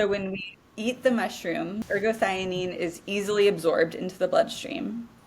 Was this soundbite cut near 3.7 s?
no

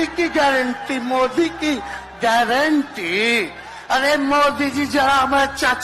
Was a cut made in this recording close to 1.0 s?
no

